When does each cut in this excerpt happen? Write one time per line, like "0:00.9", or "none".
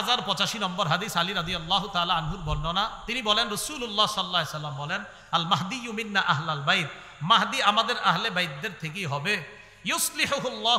none